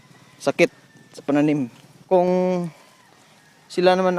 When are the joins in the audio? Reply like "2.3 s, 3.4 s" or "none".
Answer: 2.1 s